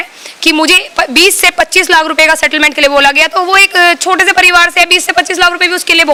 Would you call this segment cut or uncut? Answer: uncut